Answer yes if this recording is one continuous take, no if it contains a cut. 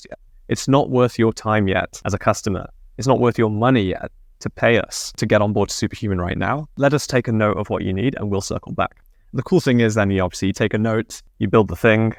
yes